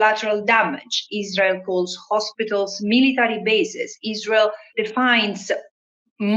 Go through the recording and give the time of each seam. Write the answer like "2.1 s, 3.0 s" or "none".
4.6 s